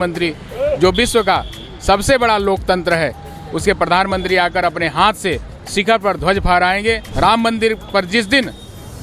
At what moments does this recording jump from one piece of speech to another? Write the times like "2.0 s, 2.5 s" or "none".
7.1 s